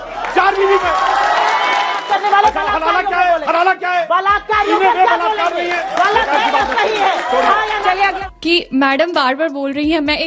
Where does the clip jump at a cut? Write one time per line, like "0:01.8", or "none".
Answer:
0:02.0
0:08.2